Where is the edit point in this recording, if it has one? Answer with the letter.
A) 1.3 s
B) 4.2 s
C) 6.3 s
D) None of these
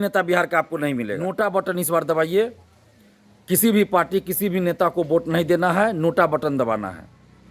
A